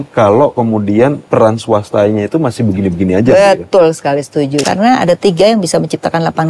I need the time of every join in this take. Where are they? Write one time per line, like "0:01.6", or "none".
0:01.2
0:04.7